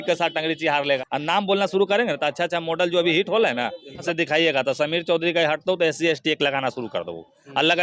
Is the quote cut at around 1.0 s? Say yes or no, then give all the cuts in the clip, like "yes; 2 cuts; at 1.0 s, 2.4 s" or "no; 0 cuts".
yes; 2 cuts; at 1.0 s, 4.0 s